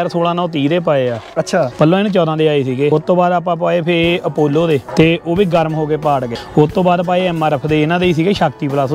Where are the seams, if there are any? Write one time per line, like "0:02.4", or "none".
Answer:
0:01.7
0:02.9
0:04.9
0:06.4